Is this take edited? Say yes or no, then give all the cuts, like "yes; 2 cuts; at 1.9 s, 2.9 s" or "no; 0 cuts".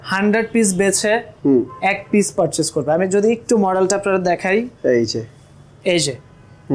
no; 0 cuts